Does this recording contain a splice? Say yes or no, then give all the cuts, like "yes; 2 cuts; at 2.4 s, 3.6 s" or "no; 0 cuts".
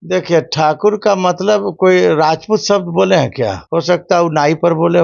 yes; 1 cut; at 3.6 s